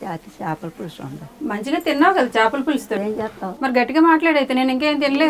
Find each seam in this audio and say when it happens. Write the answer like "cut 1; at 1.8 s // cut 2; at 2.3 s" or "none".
cut 1; at 3.0 s

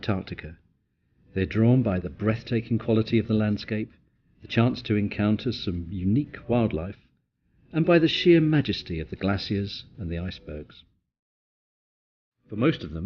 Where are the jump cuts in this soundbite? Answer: cut 1; at 1.4 s

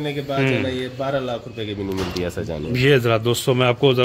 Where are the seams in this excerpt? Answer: none

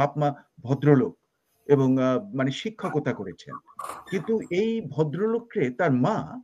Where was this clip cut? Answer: none

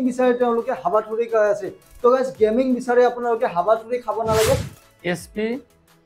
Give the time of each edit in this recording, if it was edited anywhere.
cut 1; at 4.7 s

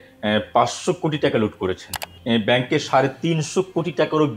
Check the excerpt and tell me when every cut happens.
cut 1; at 2.1 s

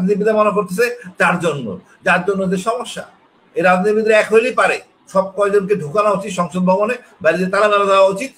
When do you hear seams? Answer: none

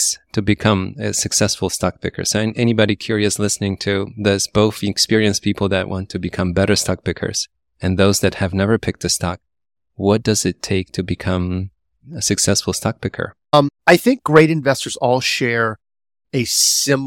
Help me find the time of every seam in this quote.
cut 1; at 13.3 s

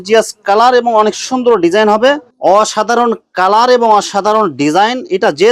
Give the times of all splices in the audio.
cut 1; at 2.3 s

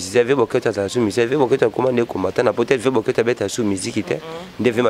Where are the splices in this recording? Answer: none

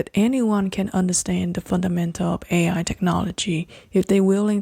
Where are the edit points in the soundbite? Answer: none

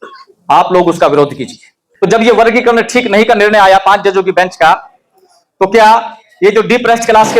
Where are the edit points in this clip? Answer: cut 1; at 1.8 s

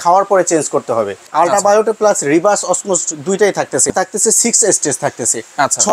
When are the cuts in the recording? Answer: cut 1; at 1.2 s // cut 2; at 3.9 s

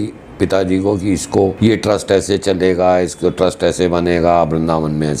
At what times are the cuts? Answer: cut 1; at 1.5 s

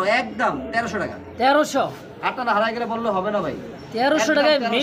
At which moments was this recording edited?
none

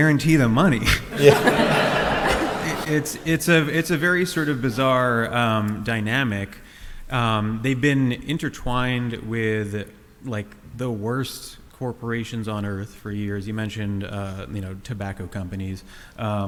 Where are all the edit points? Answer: none

